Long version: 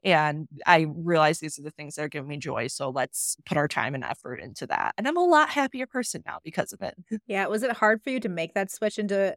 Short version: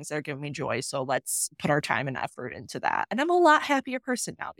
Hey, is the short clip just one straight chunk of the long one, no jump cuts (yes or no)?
yes